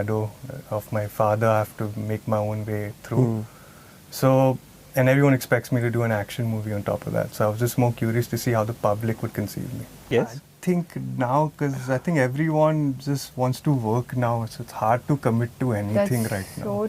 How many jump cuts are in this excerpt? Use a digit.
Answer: 1